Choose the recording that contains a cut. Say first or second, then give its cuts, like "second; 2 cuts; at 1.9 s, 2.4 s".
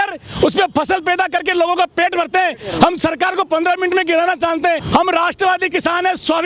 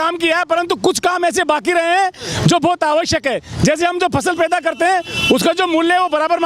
first; 1 cut; at 4.8 s